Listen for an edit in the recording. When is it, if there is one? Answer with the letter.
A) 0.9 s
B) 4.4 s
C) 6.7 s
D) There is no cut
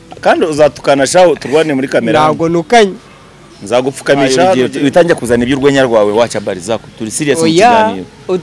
B